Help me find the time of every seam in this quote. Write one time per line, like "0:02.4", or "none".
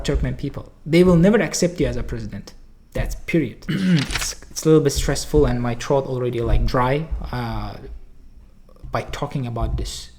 0:03.6